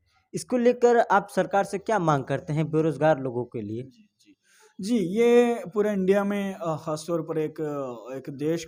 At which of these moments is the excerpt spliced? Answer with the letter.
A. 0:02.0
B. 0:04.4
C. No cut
C